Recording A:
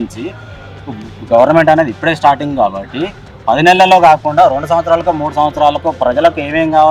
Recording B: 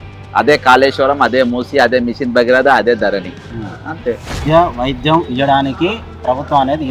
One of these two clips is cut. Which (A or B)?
B